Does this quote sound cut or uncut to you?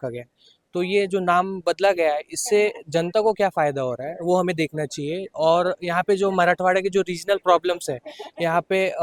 uncut